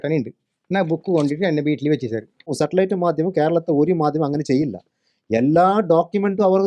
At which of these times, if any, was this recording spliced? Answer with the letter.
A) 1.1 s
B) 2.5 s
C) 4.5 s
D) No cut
B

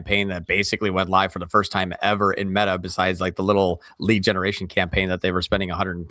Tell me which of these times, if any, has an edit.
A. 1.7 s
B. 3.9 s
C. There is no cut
B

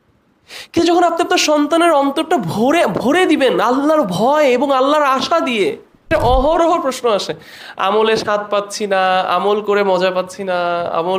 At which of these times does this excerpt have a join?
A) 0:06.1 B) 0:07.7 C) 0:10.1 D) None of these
A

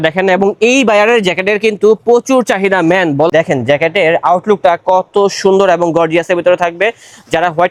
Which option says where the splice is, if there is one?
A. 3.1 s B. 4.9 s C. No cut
C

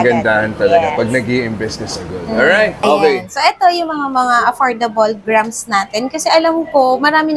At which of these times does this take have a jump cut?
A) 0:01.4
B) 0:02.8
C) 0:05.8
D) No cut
B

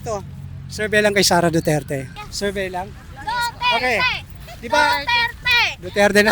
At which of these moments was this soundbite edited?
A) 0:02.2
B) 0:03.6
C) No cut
A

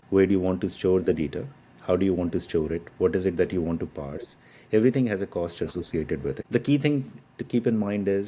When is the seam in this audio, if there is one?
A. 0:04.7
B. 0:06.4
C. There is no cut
B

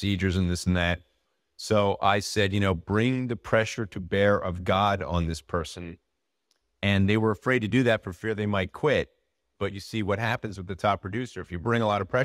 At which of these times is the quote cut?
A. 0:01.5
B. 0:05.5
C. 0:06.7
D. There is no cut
D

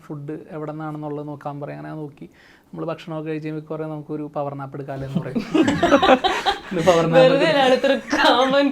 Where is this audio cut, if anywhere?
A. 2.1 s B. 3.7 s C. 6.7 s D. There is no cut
D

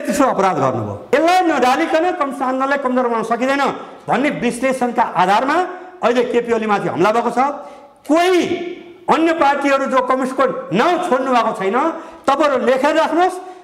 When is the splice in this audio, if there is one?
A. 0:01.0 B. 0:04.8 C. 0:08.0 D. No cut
A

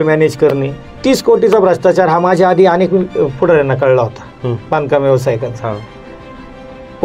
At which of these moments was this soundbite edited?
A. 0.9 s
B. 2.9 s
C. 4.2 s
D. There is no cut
A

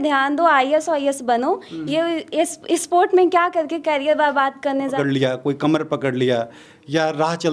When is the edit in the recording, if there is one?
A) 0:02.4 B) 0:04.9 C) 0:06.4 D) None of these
B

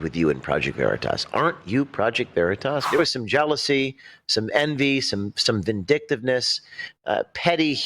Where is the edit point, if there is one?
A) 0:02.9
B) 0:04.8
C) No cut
A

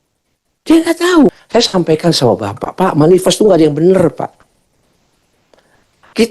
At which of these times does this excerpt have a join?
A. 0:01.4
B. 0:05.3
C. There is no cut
A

